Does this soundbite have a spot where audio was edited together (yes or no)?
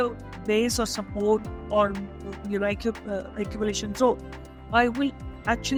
no